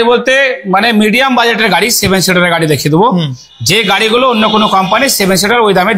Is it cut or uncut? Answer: uncut